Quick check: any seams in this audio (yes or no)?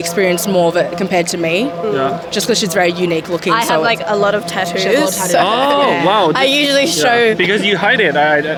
no